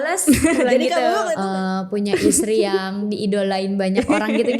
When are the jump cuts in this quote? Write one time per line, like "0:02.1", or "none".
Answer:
0:01.4